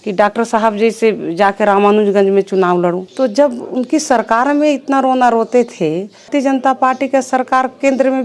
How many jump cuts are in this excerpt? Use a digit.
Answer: 2